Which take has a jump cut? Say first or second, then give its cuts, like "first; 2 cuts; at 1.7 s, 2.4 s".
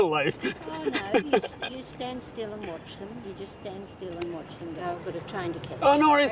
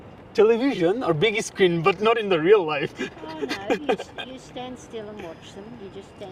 first; 1 cut; at 4.8 s